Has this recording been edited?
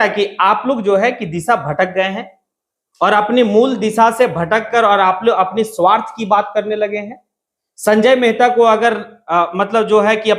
no; 0 cuts

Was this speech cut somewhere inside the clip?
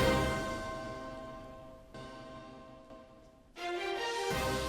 yes; 1 cut; at 1.9 s

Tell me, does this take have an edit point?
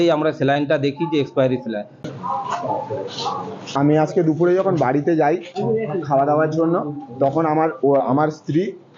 yes; 1 cut; at 2.0 s

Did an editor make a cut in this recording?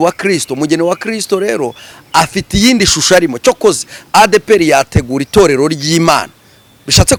no; 0 cuts

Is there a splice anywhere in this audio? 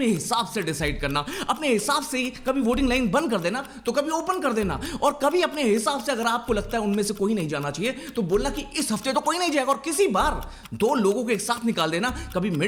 no; 0 cuts

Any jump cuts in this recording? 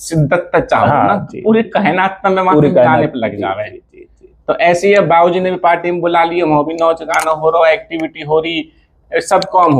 no; 0 cuts

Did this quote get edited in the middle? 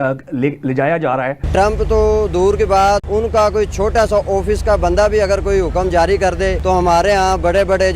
yes; 3 cuts; at 1.5 s, 3.1 s, 6.6 s

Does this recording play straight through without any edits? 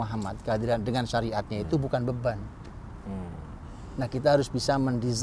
yes; 0 cuts

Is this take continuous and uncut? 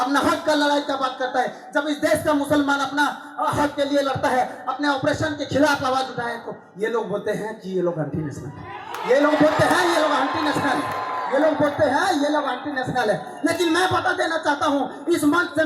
yes; 0 cuts

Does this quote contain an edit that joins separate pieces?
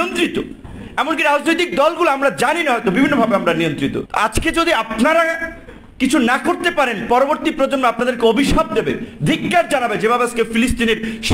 yes; 1 cut; at 4.1 s

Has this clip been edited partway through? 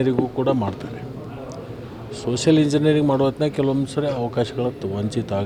no; 0 cuts

